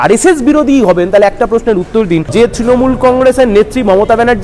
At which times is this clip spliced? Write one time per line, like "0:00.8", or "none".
0:02.3